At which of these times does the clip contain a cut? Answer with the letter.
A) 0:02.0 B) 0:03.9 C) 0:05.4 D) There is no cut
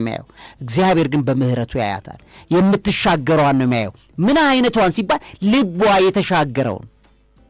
D